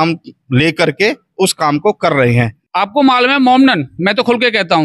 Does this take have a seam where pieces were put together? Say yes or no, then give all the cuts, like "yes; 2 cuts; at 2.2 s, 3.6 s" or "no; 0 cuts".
yes; 1 cut; at 2.6 s